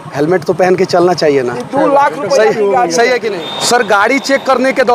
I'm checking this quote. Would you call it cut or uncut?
cut